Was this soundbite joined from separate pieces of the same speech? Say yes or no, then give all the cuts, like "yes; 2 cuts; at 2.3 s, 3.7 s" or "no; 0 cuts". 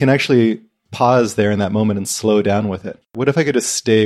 yes; 1 cut; at 3.1 s